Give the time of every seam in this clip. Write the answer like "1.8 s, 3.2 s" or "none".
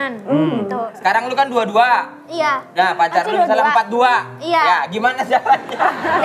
0.9 s